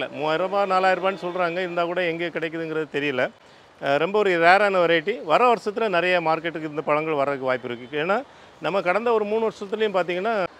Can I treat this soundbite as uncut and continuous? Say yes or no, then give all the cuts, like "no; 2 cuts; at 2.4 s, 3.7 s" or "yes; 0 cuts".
yes; 0 cuts